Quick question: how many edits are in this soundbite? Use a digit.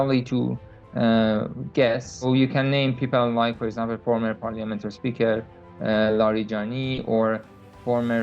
1